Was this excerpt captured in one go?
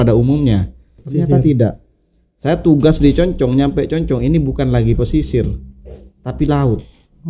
no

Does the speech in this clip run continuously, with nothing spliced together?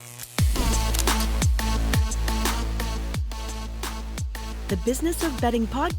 no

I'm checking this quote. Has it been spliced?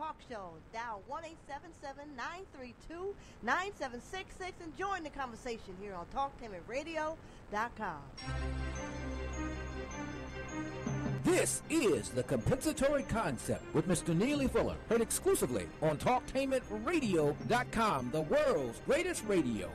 yes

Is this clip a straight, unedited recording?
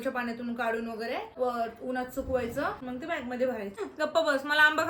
no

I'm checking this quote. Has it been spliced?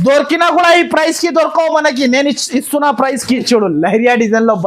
yes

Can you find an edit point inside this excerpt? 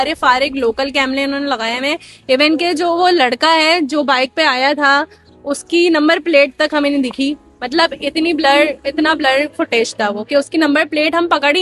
no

